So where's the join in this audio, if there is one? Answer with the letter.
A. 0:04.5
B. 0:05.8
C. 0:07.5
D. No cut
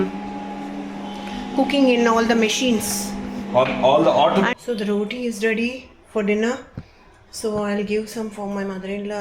A